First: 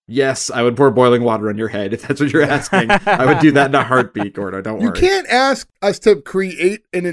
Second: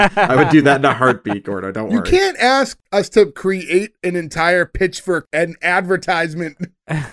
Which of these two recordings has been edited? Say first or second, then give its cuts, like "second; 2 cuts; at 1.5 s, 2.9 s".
second; 1 cut; at 5.2 s